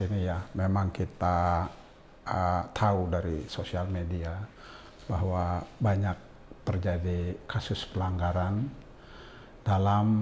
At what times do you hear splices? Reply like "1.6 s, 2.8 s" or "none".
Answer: none